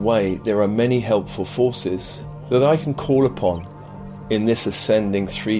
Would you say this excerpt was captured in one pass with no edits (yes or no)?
yes